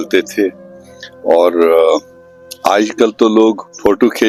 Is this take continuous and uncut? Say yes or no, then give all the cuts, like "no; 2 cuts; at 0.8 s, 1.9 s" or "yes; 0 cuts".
yes; 0 cuts